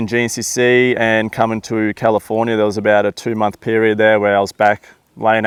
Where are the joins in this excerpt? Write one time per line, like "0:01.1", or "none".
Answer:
none